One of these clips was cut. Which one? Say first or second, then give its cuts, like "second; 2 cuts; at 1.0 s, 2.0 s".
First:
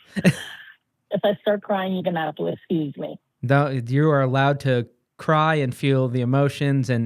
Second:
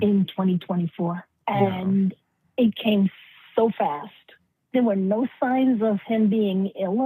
second; 2 cuts; at 1.4 s, 4.6 s